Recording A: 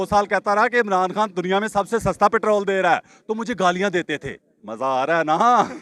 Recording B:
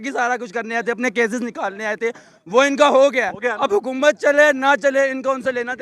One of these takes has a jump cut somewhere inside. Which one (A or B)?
A